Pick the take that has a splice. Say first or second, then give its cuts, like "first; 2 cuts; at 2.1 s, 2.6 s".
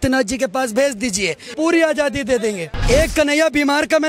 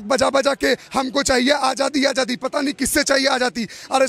first; 2 cuts; at 1.4 s, 2.7 s